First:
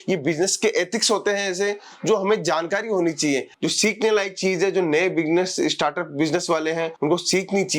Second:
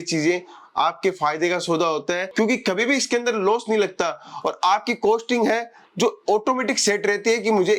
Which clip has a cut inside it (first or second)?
first